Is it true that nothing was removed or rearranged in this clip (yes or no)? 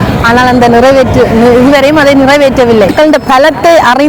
no